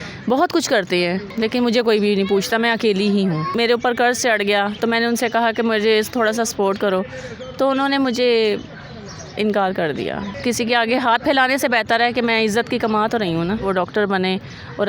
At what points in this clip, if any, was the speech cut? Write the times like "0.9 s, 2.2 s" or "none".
1.3 s, 3.5 s, 10.3 s, 13.6 s